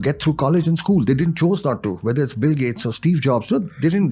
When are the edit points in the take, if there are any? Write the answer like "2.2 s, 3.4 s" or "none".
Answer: none